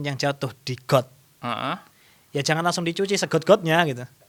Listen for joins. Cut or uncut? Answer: uncut